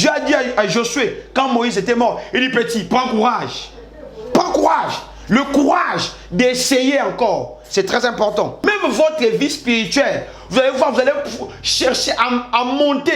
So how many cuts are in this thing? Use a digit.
1